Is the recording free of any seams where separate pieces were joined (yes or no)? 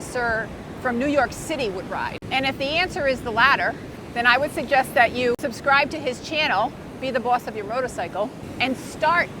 no